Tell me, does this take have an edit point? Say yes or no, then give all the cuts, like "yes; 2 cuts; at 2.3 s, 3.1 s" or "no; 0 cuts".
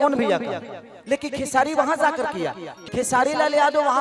yes; 1 cut; at 2.7 s